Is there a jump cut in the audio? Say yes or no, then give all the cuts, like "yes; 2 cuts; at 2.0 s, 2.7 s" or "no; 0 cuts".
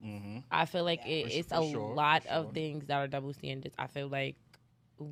no; 0 cuts